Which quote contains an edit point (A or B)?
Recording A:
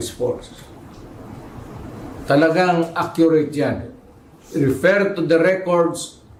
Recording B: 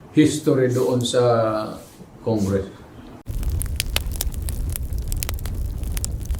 B